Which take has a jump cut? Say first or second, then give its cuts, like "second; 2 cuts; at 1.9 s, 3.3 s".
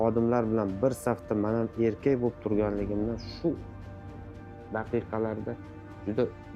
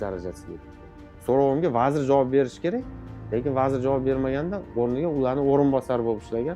second; 1 cut; at 1.1 s